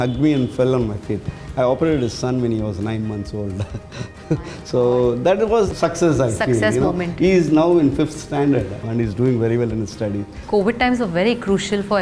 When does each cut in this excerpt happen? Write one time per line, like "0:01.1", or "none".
0:05.7
0:08.8
0:10.4